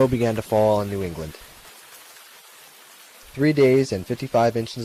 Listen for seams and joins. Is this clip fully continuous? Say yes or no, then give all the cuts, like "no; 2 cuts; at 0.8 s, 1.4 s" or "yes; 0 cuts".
yes; 0 cuts